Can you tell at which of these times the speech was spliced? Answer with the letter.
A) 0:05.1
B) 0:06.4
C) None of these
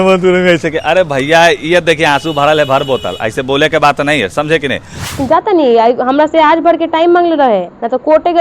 A